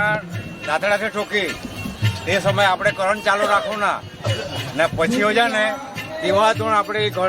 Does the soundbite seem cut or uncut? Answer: uncut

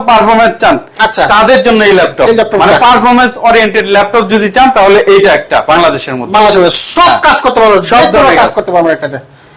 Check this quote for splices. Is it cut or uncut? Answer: uncut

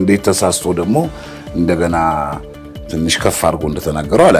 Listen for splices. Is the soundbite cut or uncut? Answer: uncut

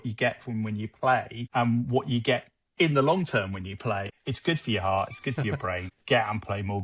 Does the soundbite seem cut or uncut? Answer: cut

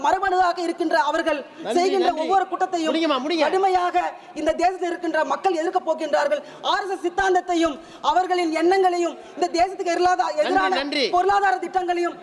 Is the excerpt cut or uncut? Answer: uncut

